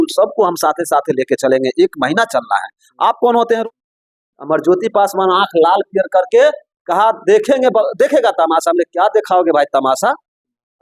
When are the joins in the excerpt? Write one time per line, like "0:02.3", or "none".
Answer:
0:03.6